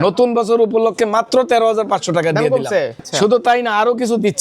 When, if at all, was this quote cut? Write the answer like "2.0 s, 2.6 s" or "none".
3.0 s